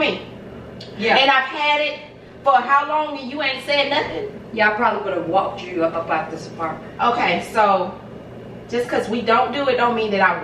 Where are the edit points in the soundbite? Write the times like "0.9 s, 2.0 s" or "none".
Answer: none

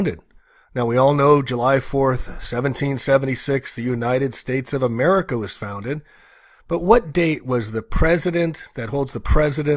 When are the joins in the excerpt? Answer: 7.4 s

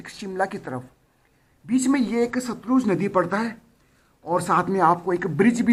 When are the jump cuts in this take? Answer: none

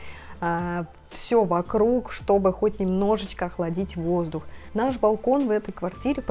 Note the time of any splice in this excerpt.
4.6 s

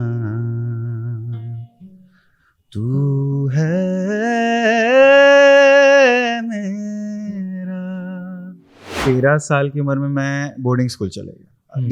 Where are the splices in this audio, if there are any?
9.0 s

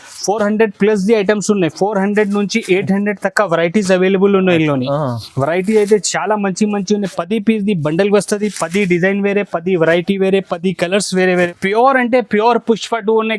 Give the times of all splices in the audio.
11.5 s

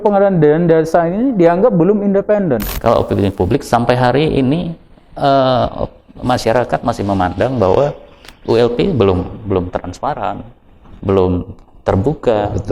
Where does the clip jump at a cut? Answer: 2.7 s

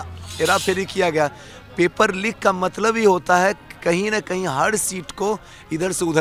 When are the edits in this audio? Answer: none

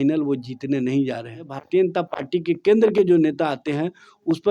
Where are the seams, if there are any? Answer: 1.6 s

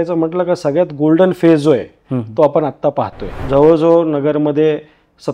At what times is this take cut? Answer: 3.4 s

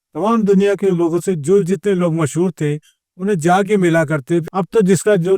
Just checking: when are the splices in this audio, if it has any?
4.4 s

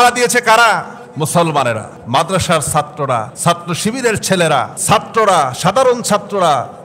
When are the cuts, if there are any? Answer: 1.0 s, 1.9 s, 3.3 s, 4.8 s

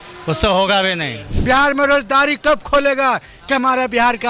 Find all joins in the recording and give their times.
1.3 s

